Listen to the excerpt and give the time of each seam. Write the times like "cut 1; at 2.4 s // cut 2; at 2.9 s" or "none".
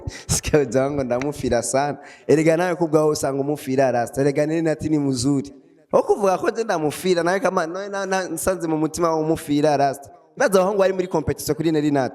none